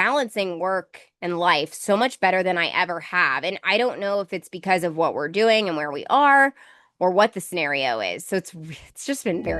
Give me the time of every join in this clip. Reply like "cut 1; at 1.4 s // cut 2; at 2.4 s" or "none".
none